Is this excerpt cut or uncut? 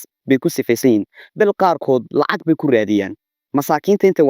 uncut